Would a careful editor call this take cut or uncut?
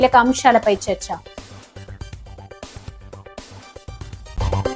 uncut